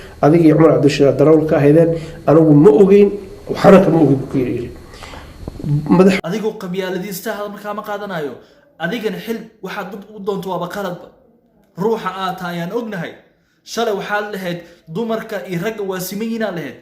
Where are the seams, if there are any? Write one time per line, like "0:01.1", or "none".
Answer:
0:06.2